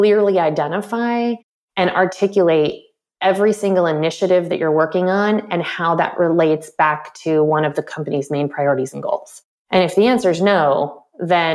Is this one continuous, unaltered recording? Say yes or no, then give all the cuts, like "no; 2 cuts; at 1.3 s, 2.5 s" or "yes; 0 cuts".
yes; 0 cuts